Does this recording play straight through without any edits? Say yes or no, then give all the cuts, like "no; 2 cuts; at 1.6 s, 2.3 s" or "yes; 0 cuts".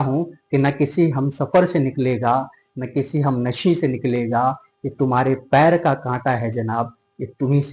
yes; 0 cuts